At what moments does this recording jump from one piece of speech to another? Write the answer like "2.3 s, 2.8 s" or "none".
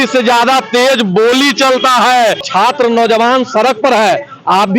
2.5 s